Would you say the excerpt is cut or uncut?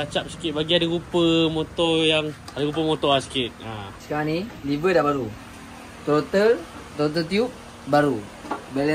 cut